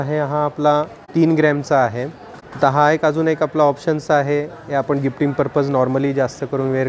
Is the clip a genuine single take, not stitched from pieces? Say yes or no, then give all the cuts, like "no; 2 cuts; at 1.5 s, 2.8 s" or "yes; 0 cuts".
no; 1 cut; at 1.0 s